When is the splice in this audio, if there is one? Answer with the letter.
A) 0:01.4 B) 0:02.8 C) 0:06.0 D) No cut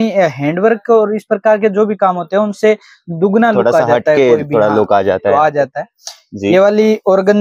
D